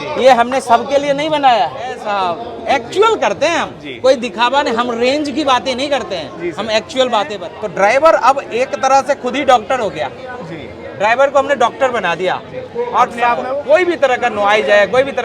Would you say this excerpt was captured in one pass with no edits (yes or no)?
no